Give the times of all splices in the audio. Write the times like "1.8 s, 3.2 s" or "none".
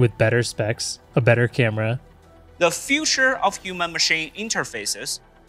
2.1 s